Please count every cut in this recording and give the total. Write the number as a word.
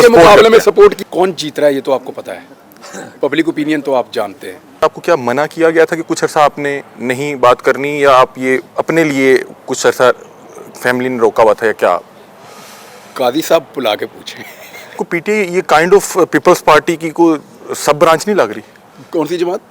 three